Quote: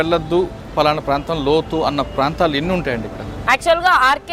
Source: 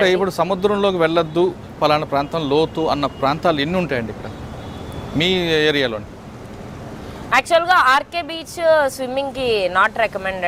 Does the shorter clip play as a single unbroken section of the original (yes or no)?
no